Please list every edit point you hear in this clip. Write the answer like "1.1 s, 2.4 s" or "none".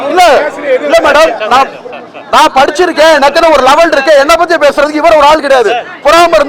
none